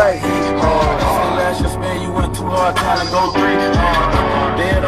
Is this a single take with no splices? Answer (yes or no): yes